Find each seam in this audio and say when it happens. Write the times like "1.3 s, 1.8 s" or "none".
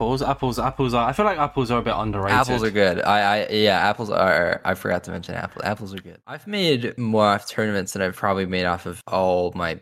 6.2 s